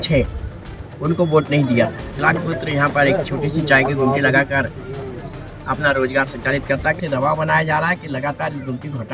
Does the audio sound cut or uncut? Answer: cut